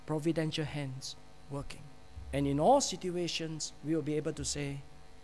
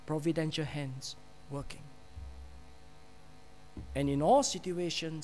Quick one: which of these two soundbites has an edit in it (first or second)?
first